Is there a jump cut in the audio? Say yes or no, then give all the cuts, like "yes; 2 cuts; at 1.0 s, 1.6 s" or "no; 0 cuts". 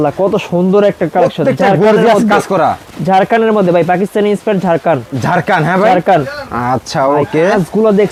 no; 0 cuts